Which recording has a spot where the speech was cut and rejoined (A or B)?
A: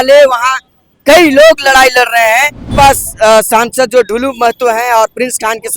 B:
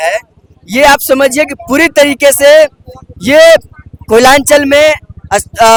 A